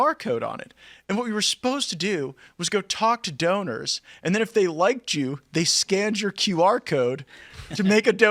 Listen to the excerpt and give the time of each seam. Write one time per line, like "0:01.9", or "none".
none